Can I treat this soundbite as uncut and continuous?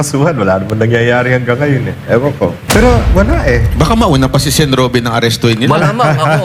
no; 1 cut; at 2.6 s

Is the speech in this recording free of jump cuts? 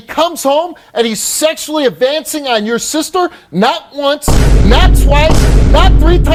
yes; 0 cuts

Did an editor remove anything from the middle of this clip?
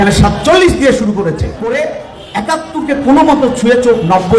yes; 1 cut; at 1.7 s

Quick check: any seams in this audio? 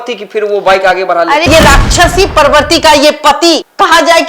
yes; 1 cut; at 1.5 s

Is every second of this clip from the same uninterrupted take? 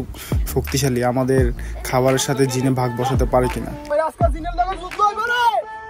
no; 1 cut; at 3.8 s

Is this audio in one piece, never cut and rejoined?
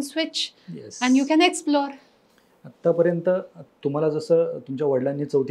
yes; 0 cuts

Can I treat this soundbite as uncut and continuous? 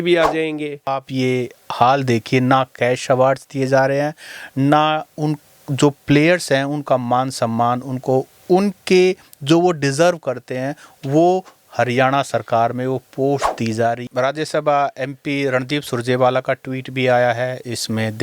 no; 2 cuts; at 1.0 s, 14.0 s

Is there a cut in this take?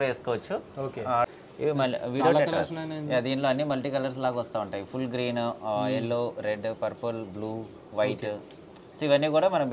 yes; 1 cut; at 1.3 s

